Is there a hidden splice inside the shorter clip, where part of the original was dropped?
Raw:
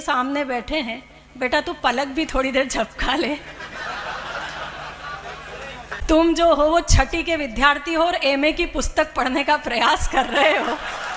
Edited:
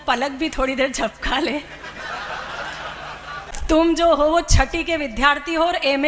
yes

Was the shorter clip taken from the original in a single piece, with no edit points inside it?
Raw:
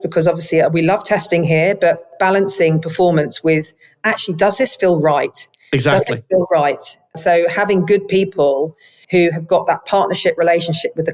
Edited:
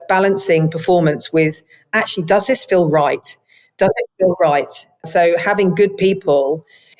yes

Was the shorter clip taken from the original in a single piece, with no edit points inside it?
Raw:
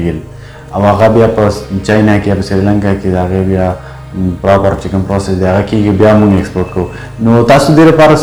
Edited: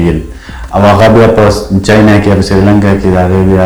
yes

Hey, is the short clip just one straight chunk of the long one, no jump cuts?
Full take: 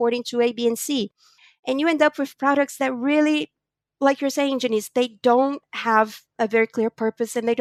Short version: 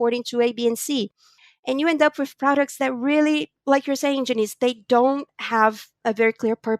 no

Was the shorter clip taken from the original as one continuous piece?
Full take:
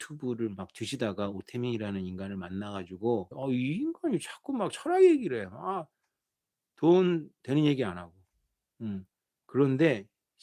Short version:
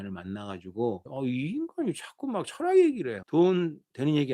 no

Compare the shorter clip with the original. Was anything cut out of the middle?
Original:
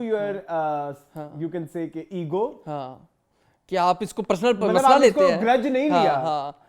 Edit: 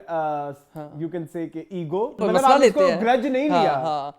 yes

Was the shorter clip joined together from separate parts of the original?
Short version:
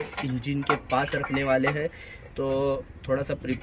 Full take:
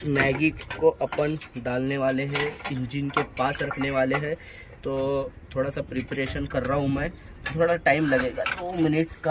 no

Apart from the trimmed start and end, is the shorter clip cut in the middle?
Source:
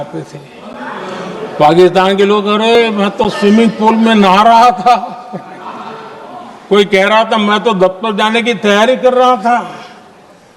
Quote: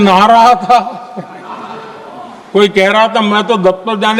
no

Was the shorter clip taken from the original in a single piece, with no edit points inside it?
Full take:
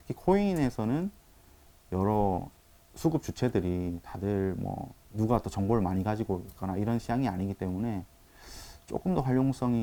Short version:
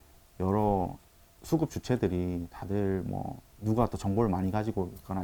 yes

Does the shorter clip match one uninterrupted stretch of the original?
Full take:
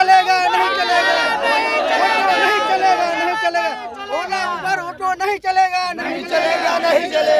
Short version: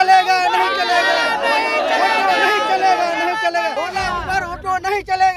no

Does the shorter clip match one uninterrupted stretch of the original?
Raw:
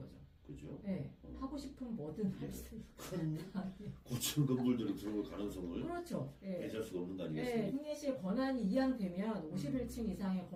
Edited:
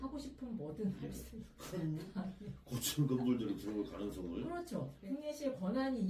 no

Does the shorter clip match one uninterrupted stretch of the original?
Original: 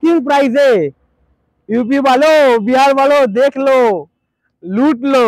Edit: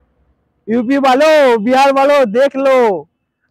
yes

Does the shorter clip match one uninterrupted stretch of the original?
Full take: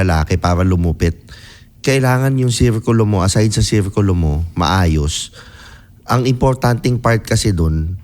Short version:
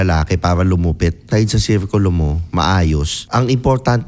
no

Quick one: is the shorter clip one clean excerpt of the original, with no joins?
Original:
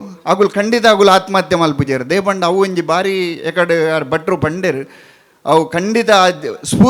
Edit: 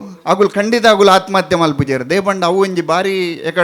yes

